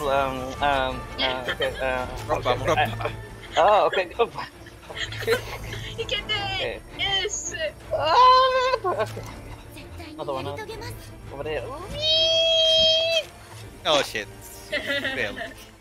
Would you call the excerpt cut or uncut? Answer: uncut